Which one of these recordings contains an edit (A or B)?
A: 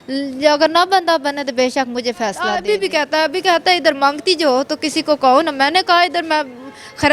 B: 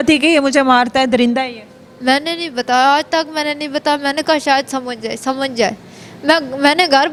A